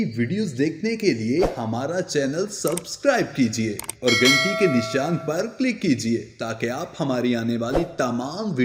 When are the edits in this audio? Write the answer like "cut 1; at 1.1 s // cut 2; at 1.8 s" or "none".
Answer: none